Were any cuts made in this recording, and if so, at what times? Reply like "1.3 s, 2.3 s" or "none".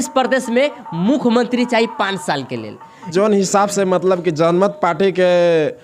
2.9 s